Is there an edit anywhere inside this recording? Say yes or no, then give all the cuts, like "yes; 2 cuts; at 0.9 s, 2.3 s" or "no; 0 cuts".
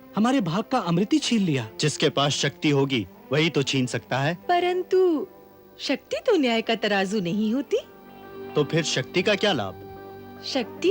yes; 2 cuts; at 1.7 s, 4.4 s